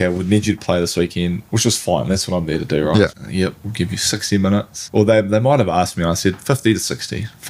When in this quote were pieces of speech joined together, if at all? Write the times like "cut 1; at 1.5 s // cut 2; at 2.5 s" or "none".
cut 1; at 3.2 s // cut 2; at 4.8 s